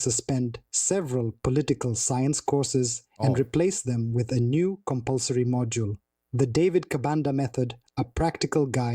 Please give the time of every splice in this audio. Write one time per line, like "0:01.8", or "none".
0:00.9